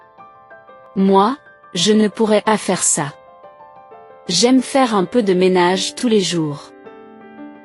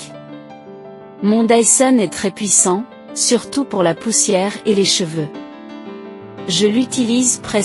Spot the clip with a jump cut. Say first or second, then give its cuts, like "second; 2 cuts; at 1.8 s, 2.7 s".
first; 1 cut; at 0.9 s